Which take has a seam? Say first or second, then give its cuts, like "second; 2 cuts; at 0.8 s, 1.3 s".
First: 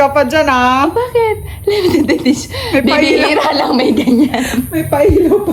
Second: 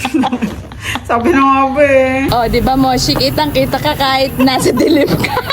second; 1 cut; at 2.3 s